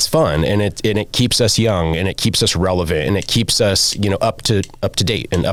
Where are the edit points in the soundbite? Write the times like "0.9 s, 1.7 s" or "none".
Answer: none